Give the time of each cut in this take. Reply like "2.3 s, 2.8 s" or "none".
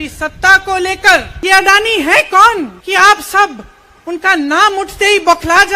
1.3 s, 2.8 s